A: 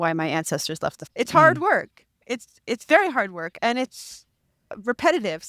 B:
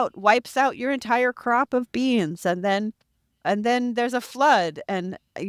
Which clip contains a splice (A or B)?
A